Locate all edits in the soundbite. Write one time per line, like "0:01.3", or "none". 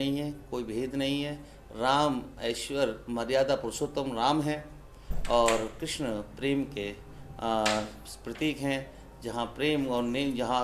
none